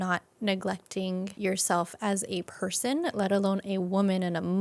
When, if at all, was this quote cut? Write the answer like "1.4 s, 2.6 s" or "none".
1.3 s, 2.5 s